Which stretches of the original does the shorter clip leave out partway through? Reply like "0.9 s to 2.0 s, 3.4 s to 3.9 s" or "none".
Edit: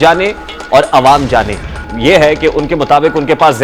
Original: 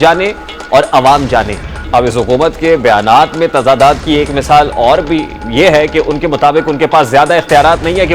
1.8 s to 5.3 s